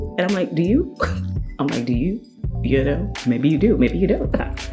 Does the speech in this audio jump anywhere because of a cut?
no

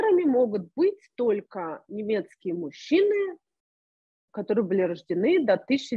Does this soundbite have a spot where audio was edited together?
no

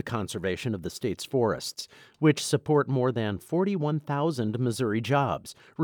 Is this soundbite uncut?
yes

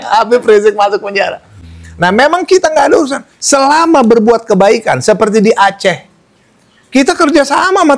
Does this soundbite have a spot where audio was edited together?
no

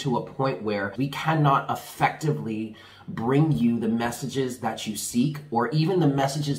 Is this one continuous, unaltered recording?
no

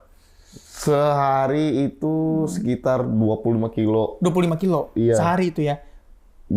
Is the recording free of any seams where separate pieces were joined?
yes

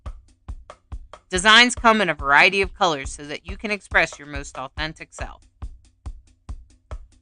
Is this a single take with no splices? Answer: no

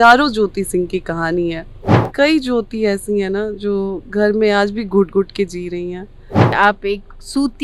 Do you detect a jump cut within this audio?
yes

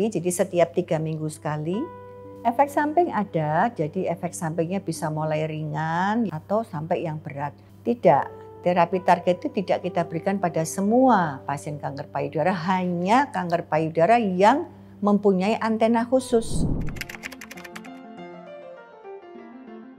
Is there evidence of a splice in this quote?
yes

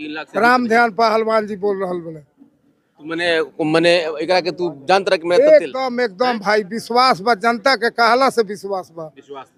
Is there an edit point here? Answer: no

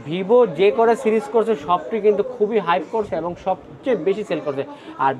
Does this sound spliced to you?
no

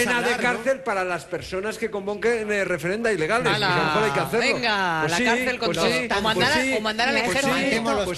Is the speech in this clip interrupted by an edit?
yes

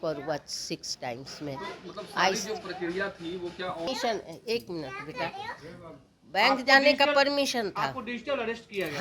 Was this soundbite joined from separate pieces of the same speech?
no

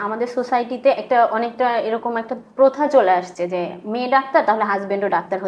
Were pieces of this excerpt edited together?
no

